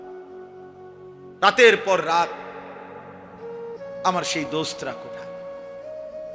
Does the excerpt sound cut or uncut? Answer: uncut